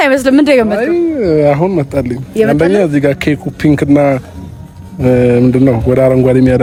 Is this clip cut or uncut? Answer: uncut